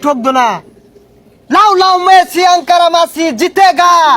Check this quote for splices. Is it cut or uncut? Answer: uncut